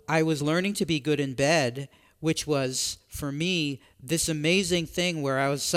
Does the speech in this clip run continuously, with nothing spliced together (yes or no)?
yes